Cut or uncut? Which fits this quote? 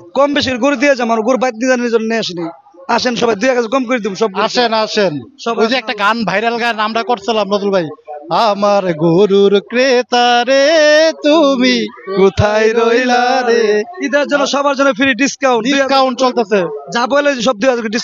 uncut